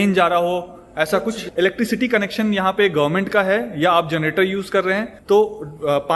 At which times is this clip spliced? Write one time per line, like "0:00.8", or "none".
0:01.4
0:05.1